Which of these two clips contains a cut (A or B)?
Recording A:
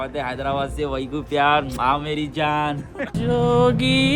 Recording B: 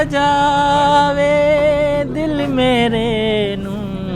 A